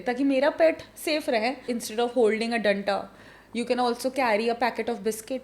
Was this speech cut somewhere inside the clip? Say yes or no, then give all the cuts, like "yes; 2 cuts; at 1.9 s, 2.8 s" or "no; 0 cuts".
yes; 1 cut; at 1.7 s